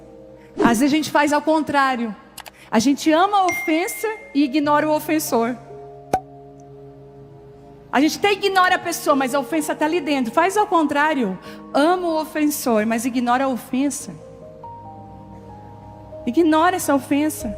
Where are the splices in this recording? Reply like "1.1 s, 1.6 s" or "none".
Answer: 13.9 s, 15.7 s